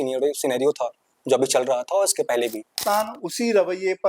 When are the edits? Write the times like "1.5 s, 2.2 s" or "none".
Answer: 2.7 s